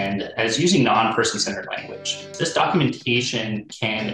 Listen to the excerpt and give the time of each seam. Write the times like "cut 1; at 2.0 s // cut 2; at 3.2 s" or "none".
cut 1; at 2.2 s